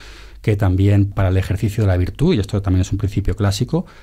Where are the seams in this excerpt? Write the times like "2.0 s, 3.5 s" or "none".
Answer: 1.1 s